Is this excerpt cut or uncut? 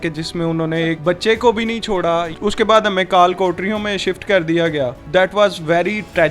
uncut